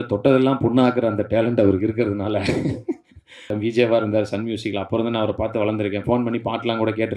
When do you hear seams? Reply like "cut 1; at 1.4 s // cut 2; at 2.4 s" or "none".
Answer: cut 1; at 3.5 s